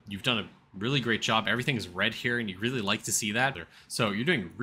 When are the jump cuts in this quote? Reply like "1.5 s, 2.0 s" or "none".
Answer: 3.6 s